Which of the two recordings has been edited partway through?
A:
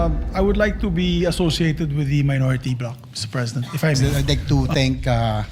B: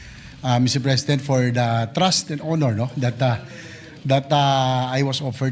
A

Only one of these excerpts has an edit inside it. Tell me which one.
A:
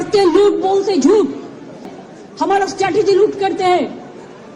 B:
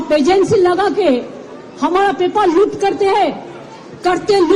A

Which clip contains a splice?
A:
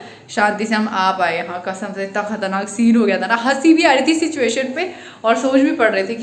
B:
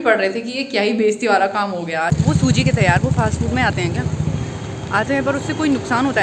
B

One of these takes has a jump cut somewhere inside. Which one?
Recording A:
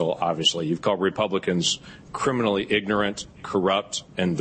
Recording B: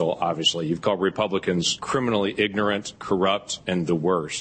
B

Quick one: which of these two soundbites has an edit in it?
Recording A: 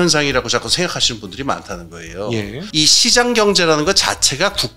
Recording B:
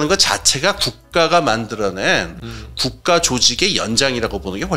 A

